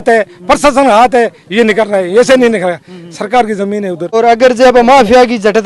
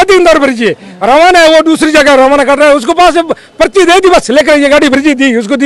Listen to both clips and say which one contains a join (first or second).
first